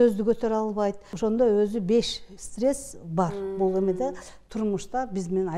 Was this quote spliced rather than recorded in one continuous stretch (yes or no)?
yes